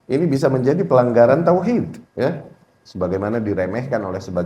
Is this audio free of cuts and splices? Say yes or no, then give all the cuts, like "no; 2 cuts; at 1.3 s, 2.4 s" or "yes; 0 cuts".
no; 1 cut; at 2.0 s